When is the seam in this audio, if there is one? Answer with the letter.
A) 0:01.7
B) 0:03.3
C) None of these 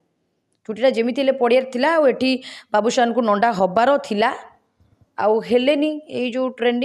C